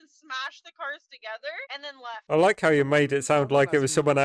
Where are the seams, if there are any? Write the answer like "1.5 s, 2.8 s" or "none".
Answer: 1.9 s

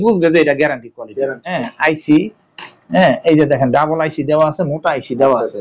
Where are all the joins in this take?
1.5 s

